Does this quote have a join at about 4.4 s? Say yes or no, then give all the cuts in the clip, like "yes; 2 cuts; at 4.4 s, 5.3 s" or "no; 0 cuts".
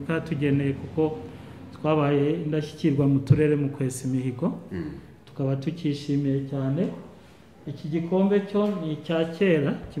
no; 0 cuts